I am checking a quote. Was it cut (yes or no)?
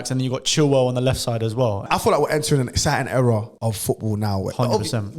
yes